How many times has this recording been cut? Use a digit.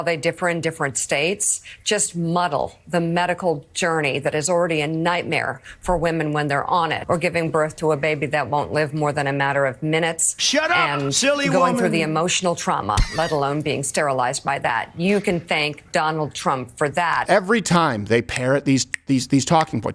2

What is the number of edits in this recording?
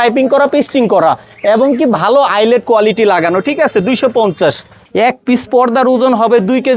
1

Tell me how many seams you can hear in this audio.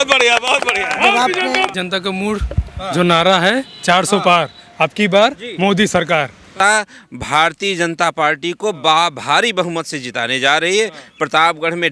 2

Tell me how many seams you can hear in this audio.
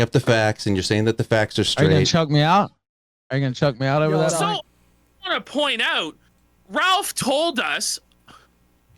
1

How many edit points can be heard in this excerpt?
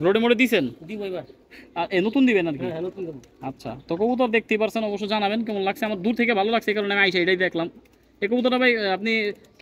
0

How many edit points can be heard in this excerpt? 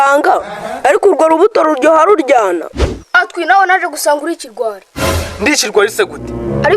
0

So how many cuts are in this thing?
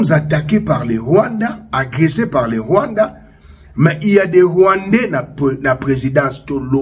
0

